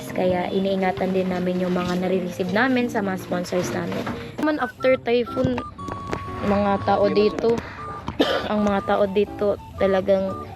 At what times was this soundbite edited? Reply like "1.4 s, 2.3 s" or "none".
4.4 s